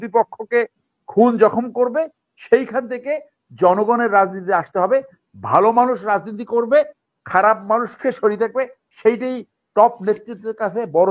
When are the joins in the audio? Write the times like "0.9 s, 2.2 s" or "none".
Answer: none